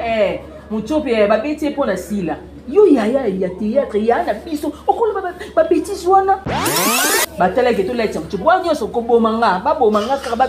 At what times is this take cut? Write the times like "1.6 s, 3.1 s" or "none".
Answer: 7.0 s